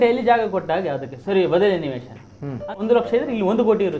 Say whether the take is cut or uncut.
cut